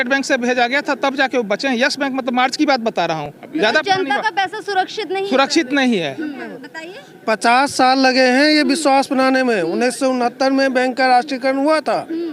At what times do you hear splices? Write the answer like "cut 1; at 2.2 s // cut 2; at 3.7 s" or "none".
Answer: none